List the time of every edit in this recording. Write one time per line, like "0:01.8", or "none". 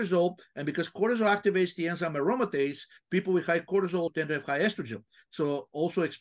0:04.1